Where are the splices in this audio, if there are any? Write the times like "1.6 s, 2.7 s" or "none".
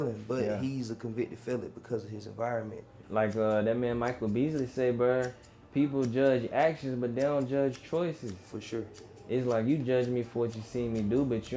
2.9 s

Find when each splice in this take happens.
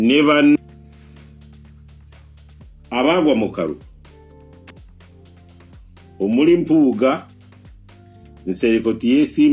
0.8 s, 2.5 s, 4.0 s, 6.2 s

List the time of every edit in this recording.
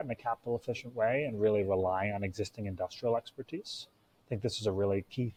none

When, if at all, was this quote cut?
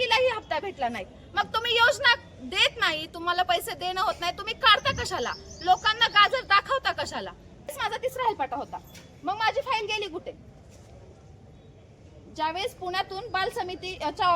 7.7 s

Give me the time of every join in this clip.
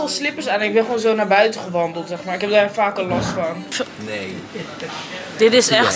3.7 s

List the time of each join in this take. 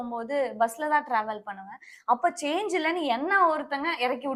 none

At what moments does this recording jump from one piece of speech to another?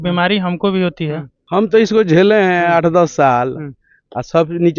none

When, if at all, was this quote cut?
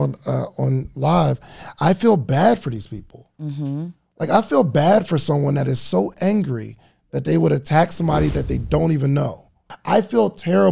9.7 s

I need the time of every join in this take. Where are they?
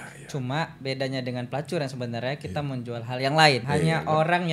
3.6 s

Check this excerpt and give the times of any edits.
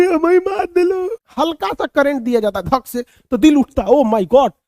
1.2 s

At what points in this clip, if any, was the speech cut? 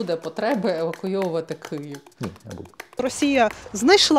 3.0 s

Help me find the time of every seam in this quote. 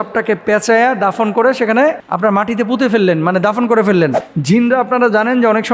4.3 s

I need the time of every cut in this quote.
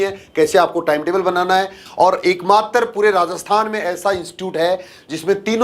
1.8 s

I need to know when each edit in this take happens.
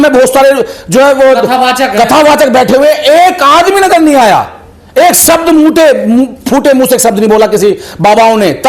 none

